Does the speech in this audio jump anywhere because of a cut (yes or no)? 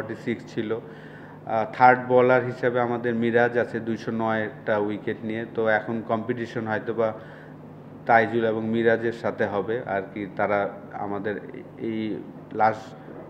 no